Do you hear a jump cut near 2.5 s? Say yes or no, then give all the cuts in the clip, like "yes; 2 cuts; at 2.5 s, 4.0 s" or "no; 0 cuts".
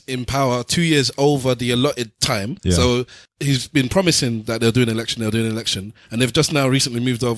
yes; 2 cuts; at 2.5 s, 3.2 s